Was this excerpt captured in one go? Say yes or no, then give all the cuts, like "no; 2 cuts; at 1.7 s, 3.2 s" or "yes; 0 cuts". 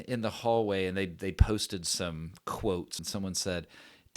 no; 1 cut; at 3.0 s